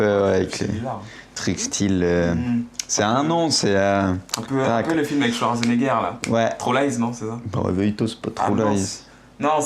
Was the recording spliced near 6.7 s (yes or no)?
no